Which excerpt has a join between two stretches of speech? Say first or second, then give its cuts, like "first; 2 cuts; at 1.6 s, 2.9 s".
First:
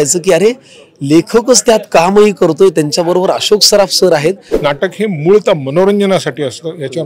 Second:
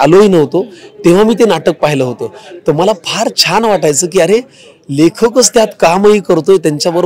first; 1 cut; at 4.5 s